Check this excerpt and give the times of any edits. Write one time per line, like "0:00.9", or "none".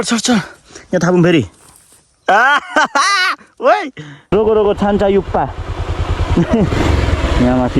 0:04.3